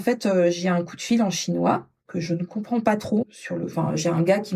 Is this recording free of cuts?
no; 1 cut; at 3.3 s

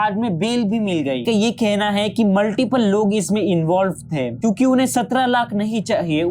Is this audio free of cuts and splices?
no; 2 cuts; at 1.2 s, 4.3 s

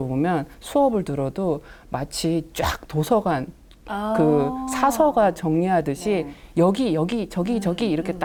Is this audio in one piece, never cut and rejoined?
yes; 0 cuts

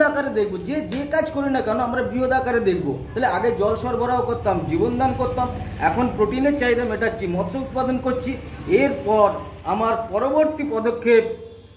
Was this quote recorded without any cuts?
yes; 0 cuts

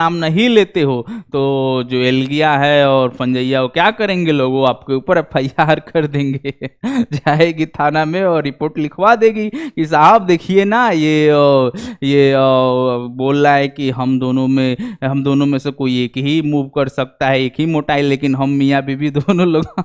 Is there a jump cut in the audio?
no; 0 cuts

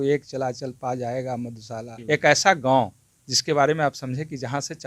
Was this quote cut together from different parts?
yes; 1 cut; at 1.9 s

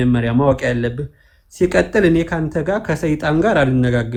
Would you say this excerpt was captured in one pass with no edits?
yes; 0 cuts

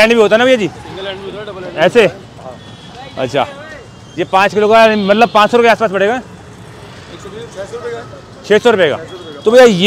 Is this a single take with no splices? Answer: yes; 0 cuts

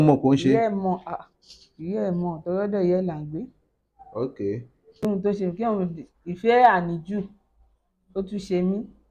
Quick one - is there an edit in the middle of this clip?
yes; 1 cut; at 5.0 s

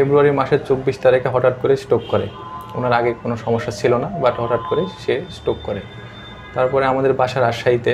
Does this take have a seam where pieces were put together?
no; 0 cuts

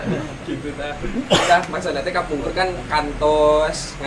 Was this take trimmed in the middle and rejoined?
no; 0 cuts

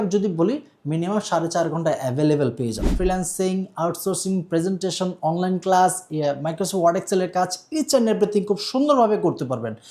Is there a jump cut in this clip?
yes; 1 cut; at 2.9 s

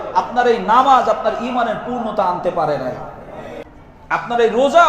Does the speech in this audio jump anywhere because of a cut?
yes; 1 cut; at 3.5 s

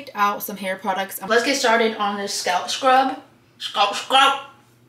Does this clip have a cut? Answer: yes; 1 cut; at 1.2 s

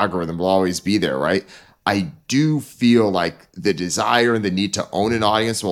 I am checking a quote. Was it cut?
yes; 1 cut; at 1.6 s

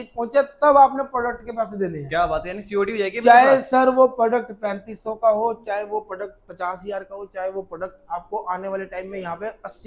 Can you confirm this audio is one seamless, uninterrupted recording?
yes; 0 cuts

